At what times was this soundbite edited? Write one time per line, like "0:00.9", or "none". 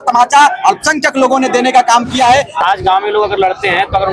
0:02.6